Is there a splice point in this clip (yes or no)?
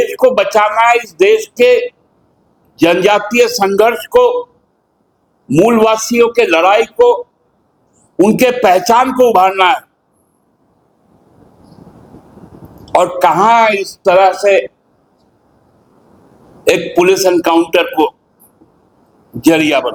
no